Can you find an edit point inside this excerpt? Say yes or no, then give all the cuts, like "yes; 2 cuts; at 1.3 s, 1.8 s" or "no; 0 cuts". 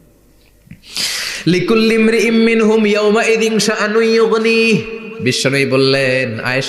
no; 0 cuts